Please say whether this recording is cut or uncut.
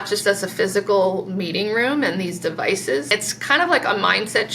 cut